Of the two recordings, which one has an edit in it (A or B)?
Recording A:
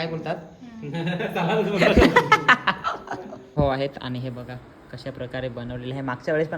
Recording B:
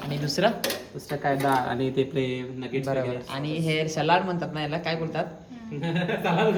A